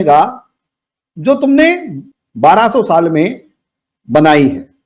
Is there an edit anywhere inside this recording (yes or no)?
yes